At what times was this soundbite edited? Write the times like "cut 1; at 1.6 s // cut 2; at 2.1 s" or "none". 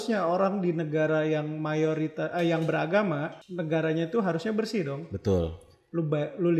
none